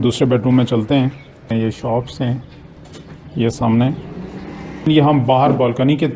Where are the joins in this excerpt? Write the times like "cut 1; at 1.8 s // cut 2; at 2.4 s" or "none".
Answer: cut 1; at 1.5 s // cut 2; at 4.9 s